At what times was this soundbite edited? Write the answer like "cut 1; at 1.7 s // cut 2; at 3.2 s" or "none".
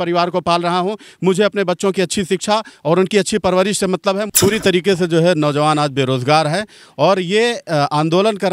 cut 1; at 4.2 s